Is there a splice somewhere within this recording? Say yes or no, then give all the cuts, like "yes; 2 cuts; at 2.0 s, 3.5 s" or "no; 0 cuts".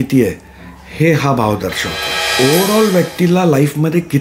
yes; 1 cut; at 2.3 s